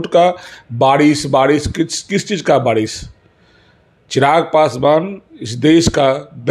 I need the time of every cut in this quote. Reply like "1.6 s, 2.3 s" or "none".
none